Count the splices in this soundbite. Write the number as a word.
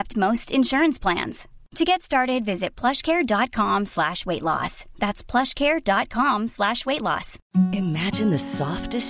one